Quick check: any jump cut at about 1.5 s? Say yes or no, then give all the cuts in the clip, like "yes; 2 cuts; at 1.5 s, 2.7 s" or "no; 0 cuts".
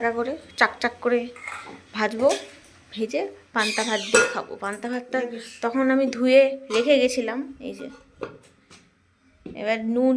no; 0 cuts